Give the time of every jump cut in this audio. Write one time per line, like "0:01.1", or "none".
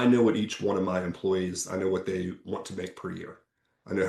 none